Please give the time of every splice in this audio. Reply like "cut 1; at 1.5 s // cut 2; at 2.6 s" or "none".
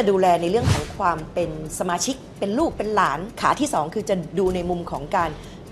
cut 1; at 3.3 s

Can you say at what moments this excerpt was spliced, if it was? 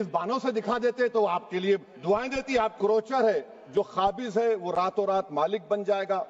cut 1; at 2.8 s

